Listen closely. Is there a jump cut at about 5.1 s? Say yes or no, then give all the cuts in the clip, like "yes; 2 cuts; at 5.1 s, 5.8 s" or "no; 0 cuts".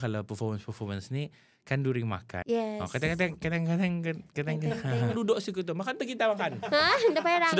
yes; 2 cuts; at 2.3 s, 5.1 s